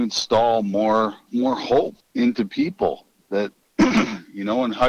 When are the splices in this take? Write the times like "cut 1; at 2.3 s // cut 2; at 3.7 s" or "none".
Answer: cut 1; at 1.2 s // cut 2; at 2.0 s // cut 3; at 3.6 s